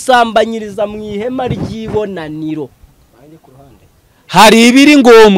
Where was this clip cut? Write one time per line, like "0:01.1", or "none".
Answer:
0:02.9